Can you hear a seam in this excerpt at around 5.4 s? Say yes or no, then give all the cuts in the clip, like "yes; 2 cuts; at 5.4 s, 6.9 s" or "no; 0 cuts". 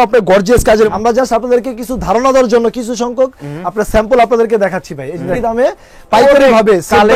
yes; 2 cuts; at 0.9 s, 5.4 s